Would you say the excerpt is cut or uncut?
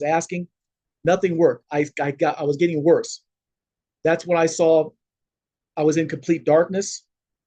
uncut